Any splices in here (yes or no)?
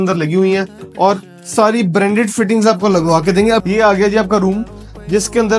yes